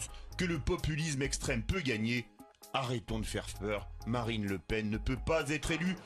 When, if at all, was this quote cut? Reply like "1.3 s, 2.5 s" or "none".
4.5 s